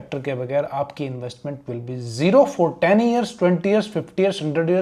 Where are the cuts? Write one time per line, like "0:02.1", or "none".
none